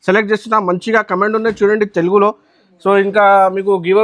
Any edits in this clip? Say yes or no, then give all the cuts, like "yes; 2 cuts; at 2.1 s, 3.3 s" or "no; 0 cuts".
no; 0 cuts